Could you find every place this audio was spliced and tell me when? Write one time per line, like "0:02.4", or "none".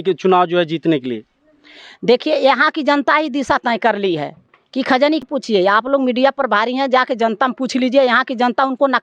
0:05.2